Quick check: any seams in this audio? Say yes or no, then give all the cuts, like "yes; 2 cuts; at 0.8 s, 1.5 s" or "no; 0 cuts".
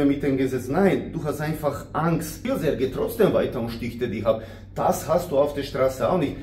yes; 1 cut; at 2.4 s